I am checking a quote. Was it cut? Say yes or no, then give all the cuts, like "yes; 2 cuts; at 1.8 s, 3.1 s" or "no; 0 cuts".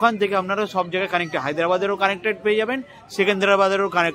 no; 0 cuts